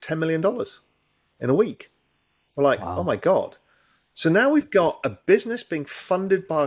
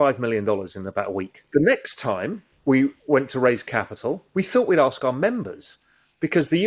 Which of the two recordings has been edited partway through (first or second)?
second